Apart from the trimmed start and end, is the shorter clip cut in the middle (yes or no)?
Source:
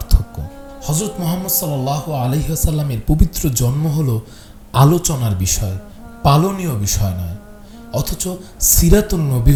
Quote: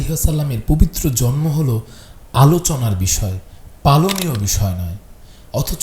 no